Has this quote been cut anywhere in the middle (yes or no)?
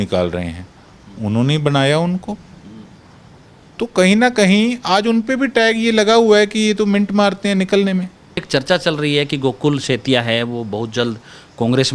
yes